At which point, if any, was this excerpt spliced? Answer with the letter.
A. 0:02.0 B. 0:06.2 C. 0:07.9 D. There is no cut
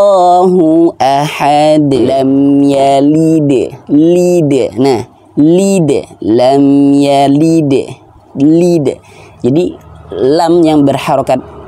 A